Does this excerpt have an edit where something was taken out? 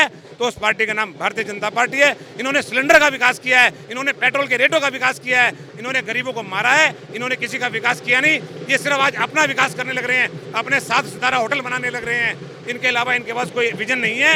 no; 0 cuts

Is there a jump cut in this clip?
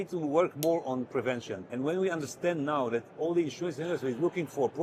yes; 1 cut; at 1.6 s

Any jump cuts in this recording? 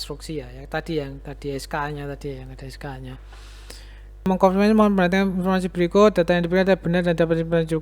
yes; 1 cut; at 4.3 s

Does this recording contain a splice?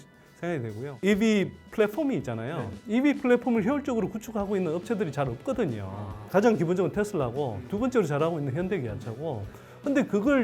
yes; 2 cuts; at 1.0 s, 6.3 s

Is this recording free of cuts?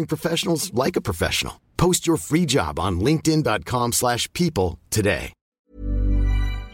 no; 1 cut; at 5.4 s

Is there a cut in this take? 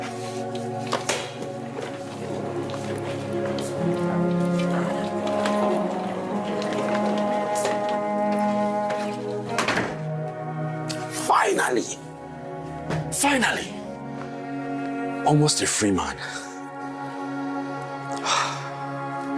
no; 0 cuts

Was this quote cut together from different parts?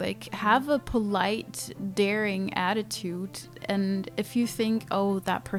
no; 0 cuts

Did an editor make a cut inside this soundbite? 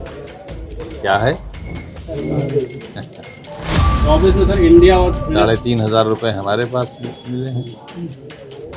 no; 0 cuts

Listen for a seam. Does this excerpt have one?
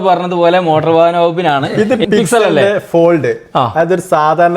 yes; 1 cut; at 1.8 s

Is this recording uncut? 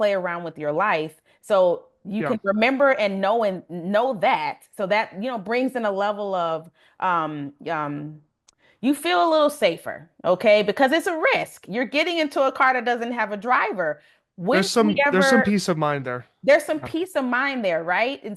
yes; 0 cuts

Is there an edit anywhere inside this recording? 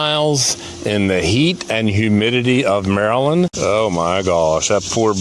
yes; 1 cut; at 3.5 s

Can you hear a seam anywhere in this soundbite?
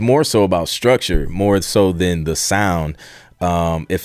no; 0 cuts

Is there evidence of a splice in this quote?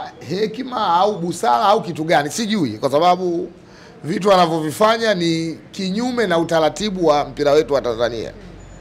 no; 0 cuts

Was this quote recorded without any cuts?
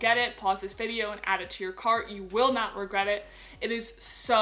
yes; 0 cuts

